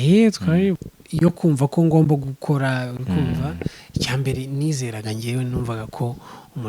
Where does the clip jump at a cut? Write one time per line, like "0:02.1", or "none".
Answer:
0:00.9